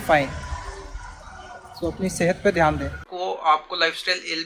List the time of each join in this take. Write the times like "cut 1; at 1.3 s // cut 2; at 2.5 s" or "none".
cut 1; at 3.0 s